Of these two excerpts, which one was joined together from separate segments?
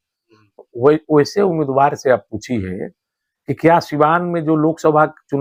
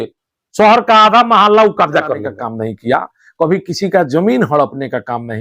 second; 1 cut; at 2.3 s

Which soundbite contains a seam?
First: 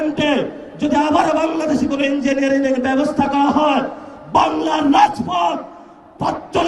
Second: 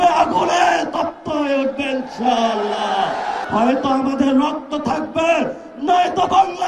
second; 1 cut; at 3.4 s

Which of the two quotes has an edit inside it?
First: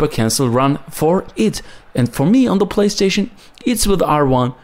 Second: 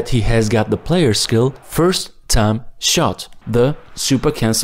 second; 1 cut; at 3.3 s

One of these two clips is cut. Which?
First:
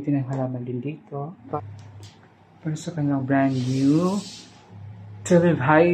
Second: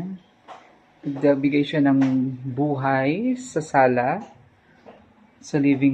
first; 1 cut; at 1.6 s

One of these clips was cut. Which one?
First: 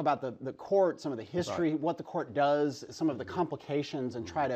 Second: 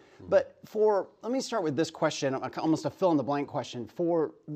first; 1 cut; at 2.8 s

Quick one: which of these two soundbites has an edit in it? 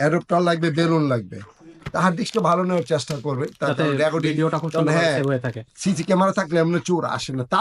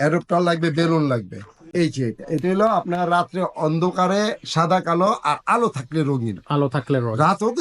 second; 1 cut; at 1.6 s

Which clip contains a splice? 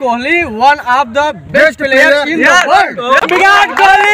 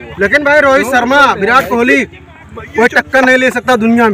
first; 1 cut; at 3.2 s

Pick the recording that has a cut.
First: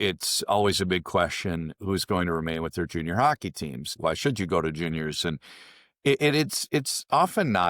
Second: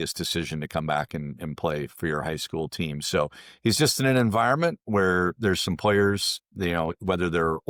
first; 1 cut; at 3.9 s

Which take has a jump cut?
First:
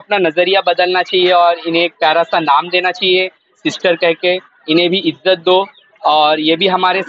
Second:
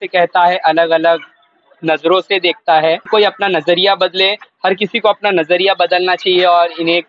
second; 1 cut; at 3.1 s

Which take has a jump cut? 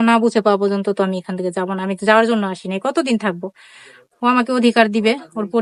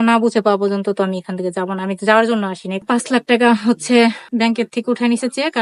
second; 2 cuts; at 2.8 s, 4.3 s

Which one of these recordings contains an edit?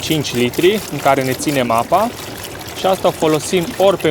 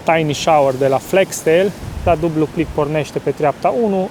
second; 1 cut; at 1.9 s

